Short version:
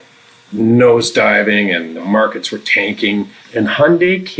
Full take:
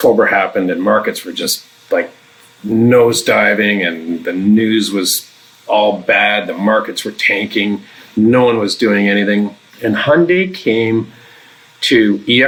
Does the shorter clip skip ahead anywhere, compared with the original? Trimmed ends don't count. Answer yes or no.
yes